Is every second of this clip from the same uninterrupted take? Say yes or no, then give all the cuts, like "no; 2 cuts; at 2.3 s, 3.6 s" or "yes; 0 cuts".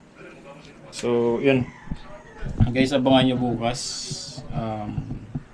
yes; 0 cuts